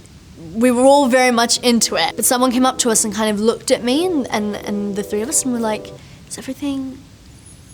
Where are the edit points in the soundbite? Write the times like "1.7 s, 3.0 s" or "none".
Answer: none